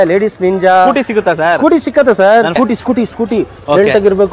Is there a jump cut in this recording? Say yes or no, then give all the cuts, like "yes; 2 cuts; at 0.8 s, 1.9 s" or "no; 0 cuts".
yes; 1 cut; at 2.6 s